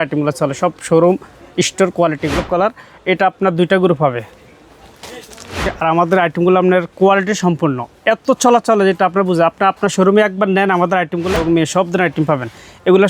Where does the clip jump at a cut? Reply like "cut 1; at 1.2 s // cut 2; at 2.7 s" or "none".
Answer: cut 1; at 2.4 s // cut 2; at 5.7 s // cut 3; at 11.3 s

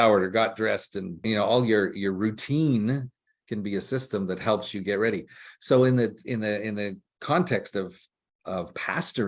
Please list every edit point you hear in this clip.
cut 1; at 1.2 s

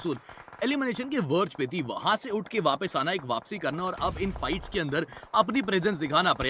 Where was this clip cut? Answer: none

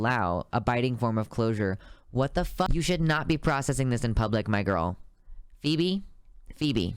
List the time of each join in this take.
cut 1; at 2.7 s

